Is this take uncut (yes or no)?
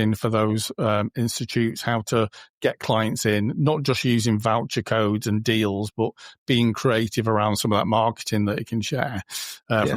yes